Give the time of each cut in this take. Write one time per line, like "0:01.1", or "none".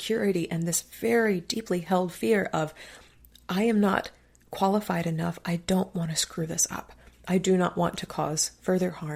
none